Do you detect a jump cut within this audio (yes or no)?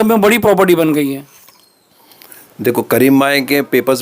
no